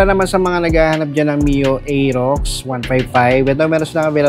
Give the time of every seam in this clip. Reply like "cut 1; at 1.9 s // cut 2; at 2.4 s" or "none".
none